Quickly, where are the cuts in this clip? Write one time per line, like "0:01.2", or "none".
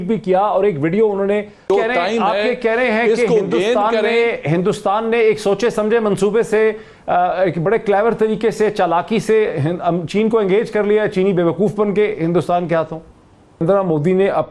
0:01.7
0:13.6